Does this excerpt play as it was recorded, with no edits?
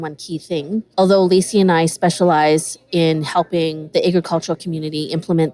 no; 2 cuts; at 0.9 s, 3.8 s

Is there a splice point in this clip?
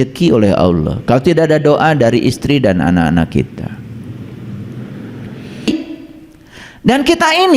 yes; 1 cut; at 5.7 s

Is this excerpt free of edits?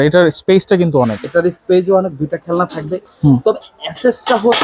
no; 1 cut; at 3.0 s

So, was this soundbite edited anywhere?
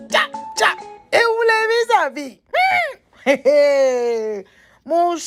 no; 0 cuts

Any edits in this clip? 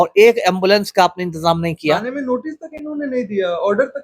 no; 0 cuts

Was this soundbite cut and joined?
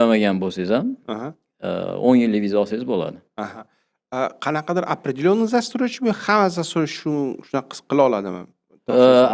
no; 0 cuts

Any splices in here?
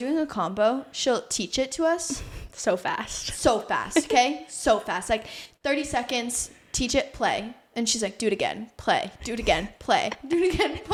no; 0 cuts

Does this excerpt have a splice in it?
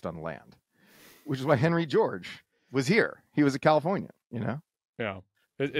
no; 0 cuts

